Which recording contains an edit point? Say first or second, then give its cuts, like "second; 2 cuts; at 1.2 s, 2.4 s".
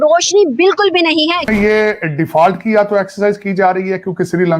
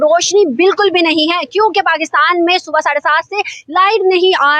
first; 1 cut; at 1.5 s